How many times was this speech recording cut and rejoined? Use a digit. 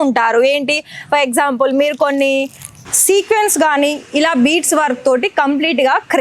1